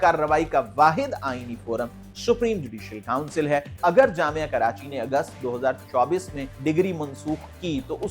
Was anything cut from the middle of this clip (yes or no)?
yes